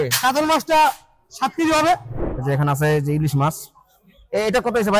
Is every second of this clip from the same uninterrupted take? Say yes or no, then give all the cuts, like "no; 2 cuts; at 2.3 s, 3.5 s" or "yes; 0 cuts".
no; 1 cut; at 2.1 s